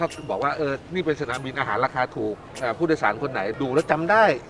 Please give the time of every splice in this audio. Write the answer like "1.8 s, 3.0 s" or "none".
2.5 s, 3.5 s

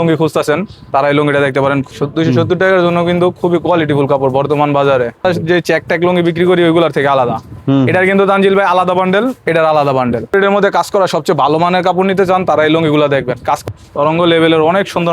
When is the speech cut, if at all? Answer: 1.9 s, 5.2 s, 10.3 s, 13.6 s

